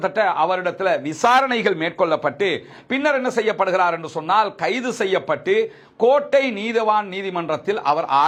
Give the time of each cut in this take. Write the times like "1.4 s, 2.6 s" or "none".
none